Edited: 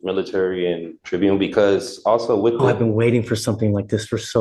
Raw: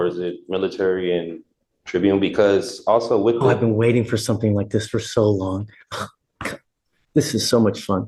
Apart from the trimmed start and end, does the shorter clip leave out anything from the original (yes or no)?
yes